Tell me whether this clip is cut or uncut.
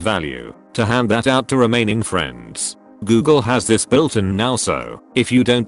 uncut